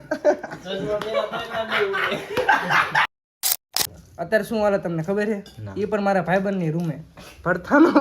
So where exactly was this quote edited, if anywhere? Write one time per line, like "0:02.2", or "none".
0:03.7